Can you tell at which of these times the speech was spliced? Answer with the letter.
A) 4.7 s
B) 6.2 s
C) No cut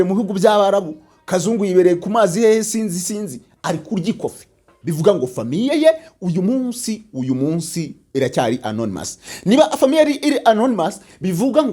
A